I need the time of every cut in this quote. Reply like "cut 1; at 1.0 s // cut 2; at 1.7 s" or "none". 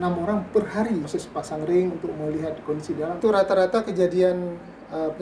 cut 1; at 1.2 s // cut 2; at 3.2 s